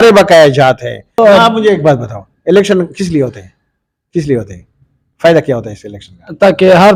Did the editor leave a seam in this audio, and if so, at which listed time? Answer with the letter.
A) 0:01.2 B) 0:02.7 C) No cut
A